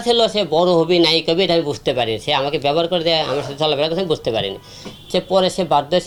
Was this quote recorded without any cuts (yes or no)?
yes